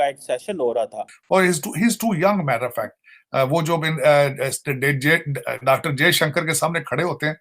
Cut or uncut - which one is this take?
cut